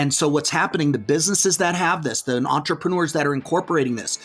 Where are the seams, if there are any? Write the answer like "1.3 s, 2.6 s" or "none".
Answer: none